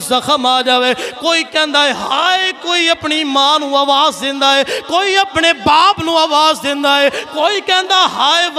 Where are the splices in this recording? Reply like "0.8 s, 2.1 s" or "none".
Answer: none

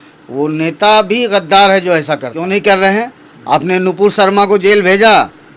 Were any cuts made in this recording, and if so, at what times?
2.3 s

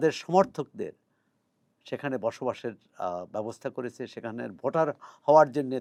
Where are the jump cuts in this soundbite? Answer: none

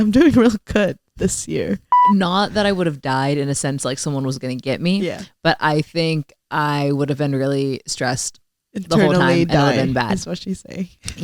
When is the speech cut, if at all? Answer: 1.9 s

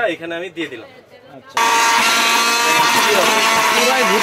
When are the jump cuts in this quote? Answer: 1.6 s

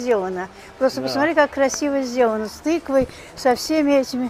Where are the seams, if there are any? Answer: none

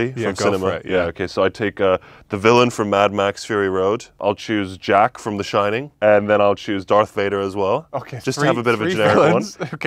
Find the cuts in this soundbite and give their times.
4.2 s, 5.9 s

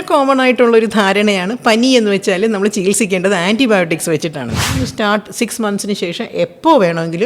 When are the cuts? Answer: 4.8 s

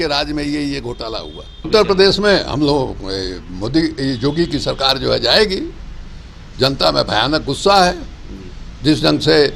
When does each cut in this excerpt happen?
1.7 s

